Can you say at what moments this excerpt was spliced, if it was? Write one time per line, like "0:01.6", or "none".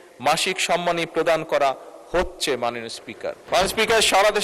0:03.4